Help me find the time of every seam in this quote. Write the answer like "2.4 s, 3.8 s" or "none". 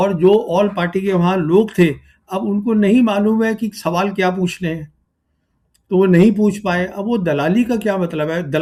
none

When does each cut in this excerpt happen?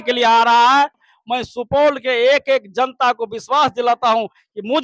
1.1 s

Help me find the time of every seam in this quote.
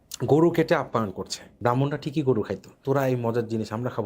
1.5 s, 2.7 s

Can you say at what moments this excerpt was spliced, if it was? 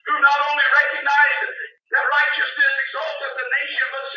none

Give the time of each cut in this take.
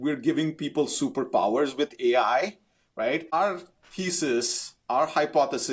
3.3 s

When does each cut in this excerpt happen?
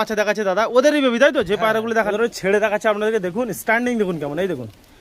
2.1 s

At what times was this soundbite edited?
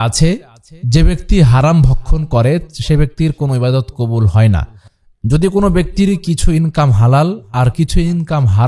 none

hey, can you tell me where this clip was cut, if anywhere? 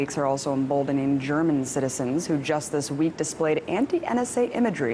2.8 s

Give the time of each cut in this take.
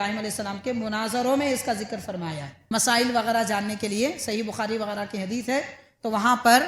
2.5 s

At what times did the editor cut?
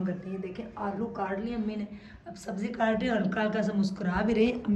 none

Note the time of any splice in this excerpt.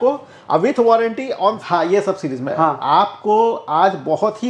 1.6 s

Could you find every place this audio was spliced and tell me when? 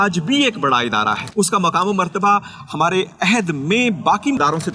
1.2 s

